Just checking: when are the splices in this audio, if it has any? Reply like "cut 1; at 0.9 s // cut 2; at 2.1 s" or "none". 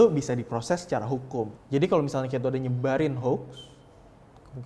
cut 1; at 1.6 s